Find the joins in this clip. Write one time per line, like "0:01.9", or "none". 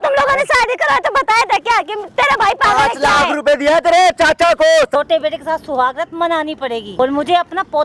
0:05.0
0:06.9